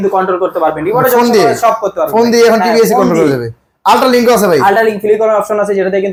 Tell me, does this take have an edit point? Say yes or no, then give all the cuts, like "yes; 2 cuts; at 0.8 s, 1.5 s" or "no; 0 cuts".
no; 0 cuts